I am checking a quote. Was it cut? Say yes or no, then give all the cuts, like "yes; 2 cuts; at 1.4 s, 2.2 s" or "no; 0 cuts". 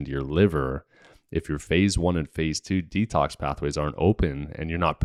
no; 0 cuts